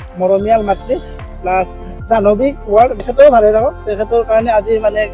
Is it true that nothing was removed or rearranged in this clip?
no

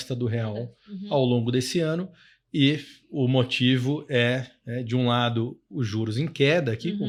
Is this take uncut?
yes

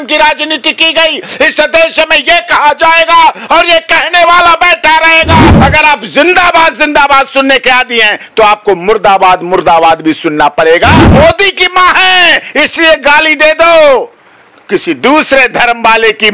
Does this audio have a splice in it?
yes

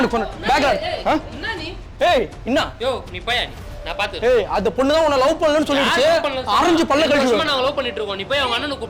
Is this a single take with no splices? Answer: yes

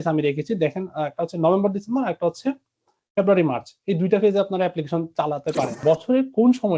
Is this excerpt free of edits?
no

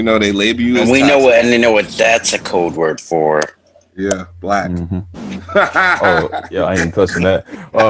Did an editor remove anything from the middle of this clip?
no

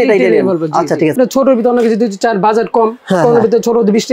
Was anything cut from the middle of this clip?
yes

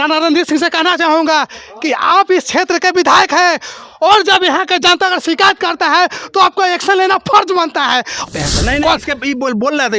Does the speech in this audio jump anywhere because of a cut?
yes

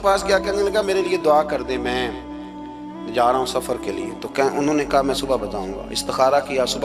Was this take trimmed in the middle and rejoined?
no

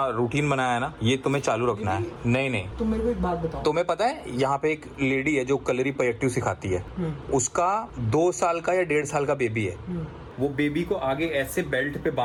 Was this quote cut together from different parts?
no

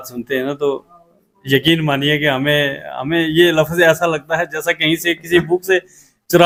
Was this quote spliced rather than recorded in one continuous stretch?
no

